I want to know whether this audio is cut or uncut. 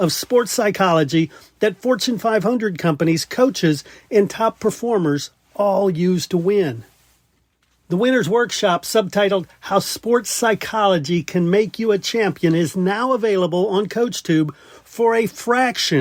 uncut